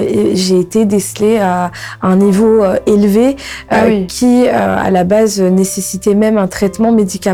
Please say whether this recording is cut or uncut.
uncut